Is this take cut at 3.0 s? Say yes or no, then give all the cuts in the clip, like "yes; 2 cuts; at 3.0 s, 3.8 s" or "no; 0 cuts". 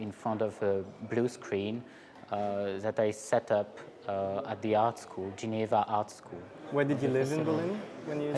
yes; 1 cut; at 3.0 s